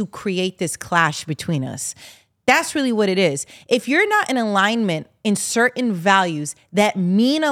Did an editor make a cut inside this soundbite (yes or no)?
no